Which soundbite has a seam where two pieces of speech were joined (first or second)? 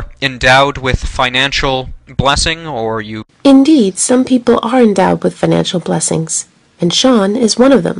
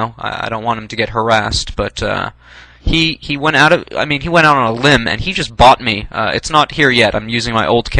second